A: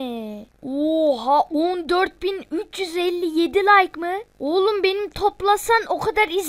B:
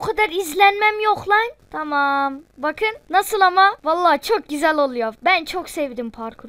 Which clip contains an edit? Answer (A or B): B